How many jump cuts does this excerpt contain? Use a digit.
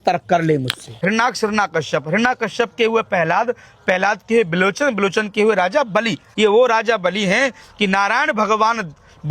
2